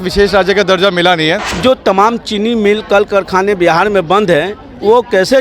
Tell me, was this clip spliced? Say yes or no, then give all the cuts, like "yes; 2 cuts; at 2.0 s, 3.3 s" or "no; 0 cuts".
yes; 1 cut; at 1.5 s